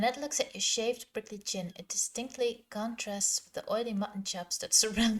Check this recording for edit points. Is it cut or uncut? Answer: uncut